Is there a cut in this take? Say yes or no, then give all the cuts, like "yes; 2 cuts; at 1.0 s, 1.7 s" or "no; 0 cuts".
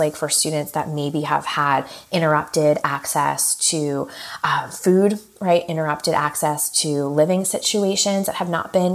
no; 0 cuts